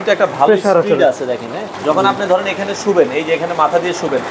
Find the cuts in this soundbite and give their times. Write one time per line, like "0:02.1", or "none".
0:01.7